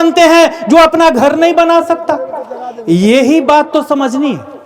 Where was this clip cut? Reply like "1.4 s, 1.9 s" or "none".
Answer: none